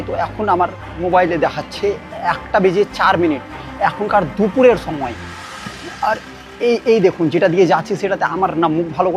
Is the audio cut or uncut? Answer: cut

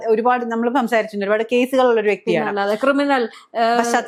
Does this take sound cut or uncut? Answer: uncut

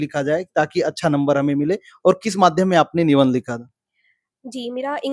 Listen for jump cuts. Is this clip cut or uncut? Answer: uncut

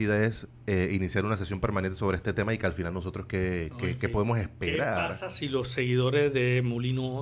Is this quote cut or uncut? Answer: uncut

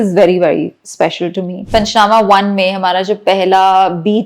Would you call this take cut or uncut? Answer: cut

